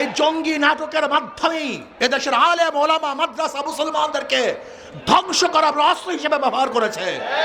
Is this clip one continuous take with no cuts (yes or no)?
yes